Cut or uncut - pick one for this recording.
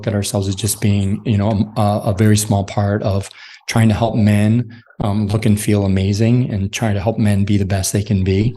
uncut